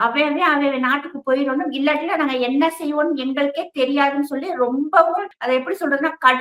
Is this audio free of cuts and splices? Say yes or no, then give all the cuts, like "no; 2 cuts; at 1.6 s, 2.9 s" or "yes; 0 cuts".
no; 1 cut; at 5.3 s